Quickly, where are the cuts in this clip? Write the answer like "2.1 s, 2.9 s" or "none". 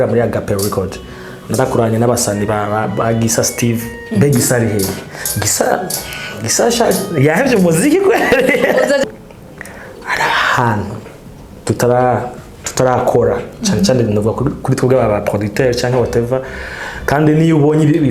9.0 s